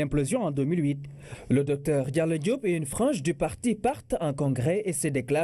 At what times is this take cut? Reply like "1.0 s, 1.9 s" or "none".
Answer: 4.0 s